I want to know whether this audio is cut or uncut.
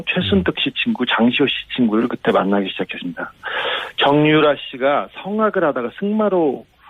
cut